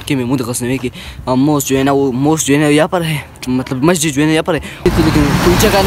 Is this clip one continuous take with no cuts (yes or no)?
no